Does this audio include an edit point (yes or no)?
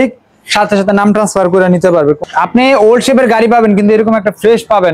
yes